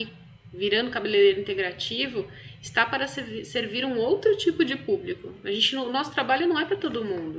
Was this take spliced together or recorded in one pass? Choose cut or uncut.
uncut